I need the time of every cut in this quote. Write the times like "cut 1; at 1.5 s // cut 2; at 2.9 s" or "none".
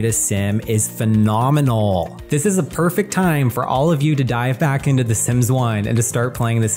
cut 1; at 2.2 s